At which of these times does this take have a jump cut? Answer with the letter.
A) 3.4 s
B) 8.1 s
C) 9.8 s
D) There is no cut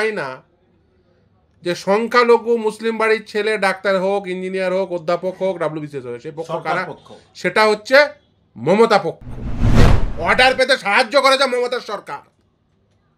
C